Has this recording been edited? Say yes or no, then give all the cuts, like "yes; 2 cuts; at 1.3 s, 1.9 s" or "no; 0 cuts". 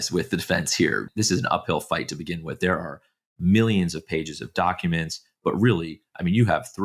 yes; 1 cut; at 1.1 s